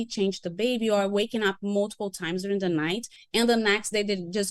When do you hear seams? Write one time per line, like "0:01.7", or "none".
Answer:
0:03.1